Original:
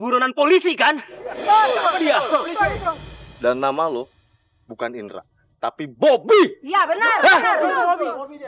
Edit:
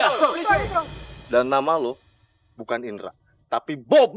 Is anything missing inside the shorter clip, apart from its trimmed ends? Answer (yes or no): no